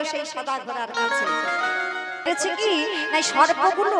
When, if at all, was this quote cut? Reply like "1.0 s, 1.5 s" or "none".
2.2 s